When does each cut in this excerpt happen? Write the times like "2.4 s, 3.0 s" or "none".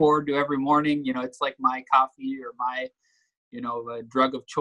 none